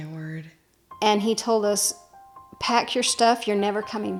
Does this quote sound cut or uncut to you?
uncut